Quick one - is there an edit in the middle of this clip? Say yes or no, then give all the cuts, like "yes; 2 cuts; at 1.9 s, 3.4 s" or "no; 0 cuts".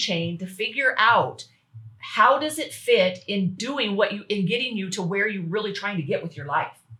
no; 0 cuts